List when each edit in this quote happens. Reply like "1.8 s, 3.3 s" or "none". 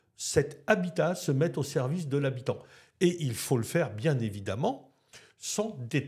none